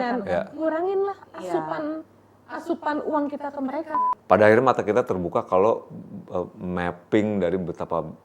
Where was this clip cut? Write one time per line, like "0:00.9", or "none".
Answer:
0:04.0